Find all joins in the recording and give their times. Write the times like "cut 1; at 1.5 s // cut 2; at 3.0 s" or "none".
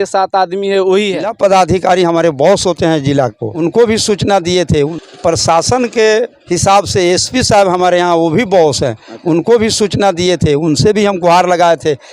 cut 1; at 1.3 s // cut 2; at 3.5 s // cut 3; at 4.9 s

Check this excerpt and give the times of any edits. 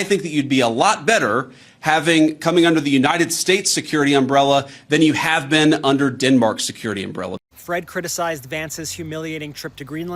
cut 1; at 7.3 s

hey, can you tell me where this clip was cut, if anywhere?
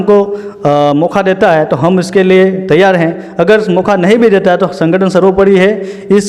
none

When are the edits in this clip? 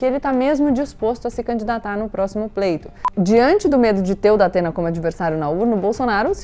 cut 1; at 3.0 s

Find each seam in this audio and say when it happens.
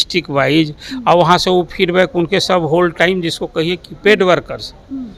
none

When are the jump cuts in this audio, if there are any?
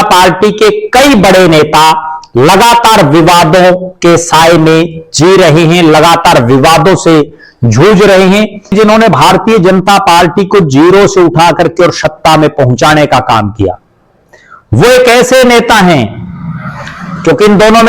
cut 1; at 8.7 s

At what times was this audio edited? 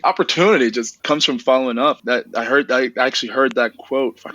cut 1; at 0.9 s // cut 2; at 2.0 s

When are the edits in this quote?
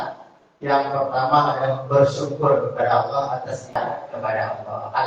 cut 1; at 3.8 s

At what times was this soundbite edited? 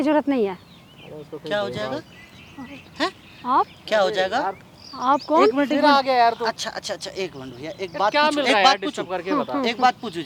none

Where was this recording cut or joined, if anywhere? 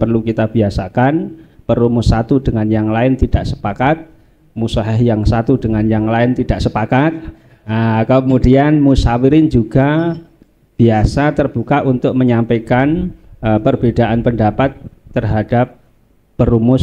none

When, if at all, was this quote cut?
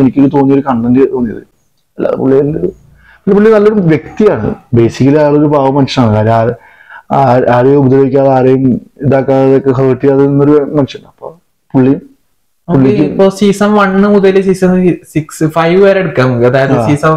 none

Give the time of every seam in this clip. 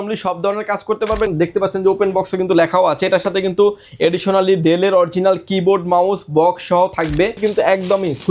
cut 1; at 1.3 s // cut 2; at 7.4 s

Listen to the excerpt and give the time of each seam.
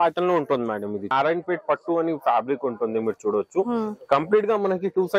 cut 1; at 1.1 s

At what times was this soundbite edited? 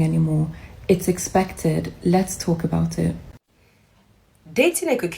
cut 1; at 3.3 s

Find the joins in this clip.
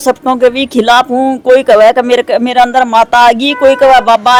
none

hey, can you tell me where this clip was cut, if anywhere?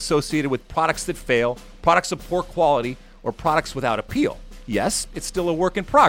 cut 1; at 4.5 s

